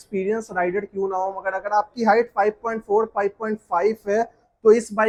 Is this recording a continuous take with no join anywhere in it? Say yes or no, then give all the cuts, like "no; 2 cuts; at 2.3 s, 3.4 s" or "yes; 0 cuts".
yes; 0 cuts